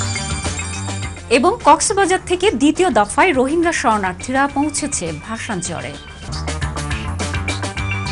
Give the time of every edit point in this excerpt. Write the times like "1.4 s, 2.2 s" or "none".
1.1 s